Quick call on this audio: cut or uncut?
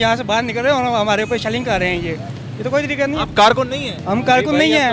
uncut